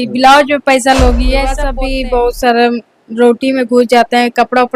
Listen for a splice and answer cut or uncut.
cut